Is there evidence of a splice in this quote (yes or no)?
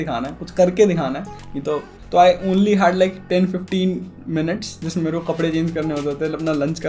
yes